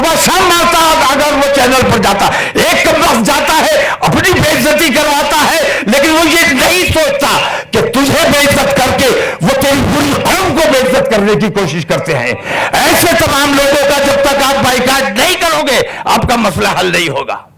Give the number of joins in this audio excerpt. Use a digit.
0